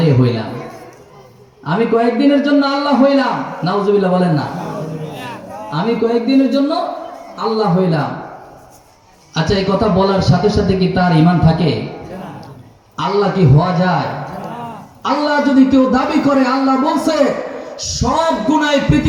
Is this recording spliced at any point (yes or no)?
no